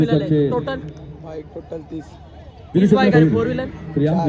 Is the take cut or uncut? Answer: uncut